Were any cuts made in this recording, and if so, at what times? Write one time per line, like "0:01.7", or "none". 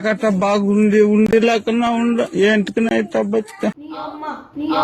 0:03.9